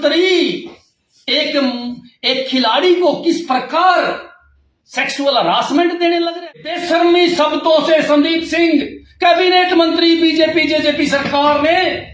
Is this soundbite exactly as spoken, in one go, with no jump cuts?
no; 1 cut; at 6.7 s

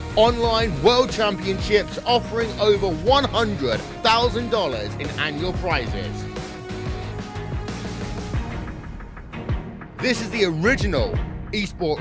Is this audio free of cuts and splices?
yes; 0 cuts

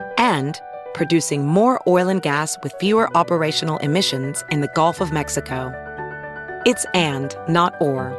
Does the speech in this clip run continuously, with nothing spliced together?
yes; 0 cuts

